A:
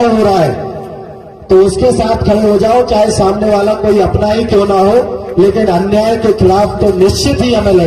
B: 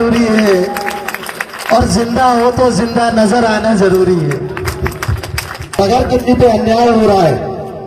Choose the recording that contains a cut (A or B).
B